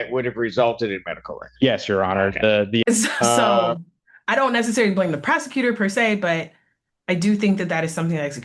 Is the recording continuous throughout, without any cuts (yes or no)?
no